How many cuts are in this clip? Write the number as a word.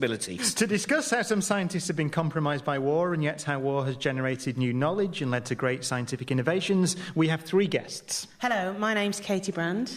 one